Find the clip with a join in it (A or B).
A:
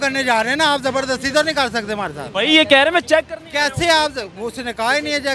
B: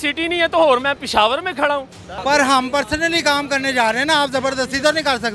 B